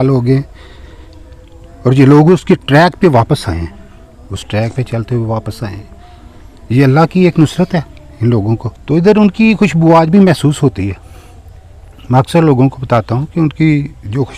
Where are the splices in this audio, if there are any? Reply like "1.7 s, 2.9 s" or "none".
8.7 s